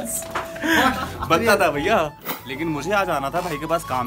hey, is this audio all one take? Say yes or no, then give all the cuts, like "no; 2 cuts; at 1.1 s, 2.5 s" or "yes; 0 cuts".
no; 1 cut; at 2.2 s